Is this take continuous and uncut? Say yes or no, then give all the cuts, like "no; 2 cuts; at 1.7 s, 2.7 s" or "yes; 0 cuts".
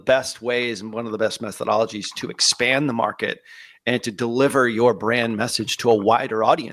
yes; 0 cuts